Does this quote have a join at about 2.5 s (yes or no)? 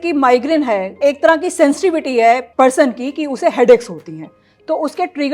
yes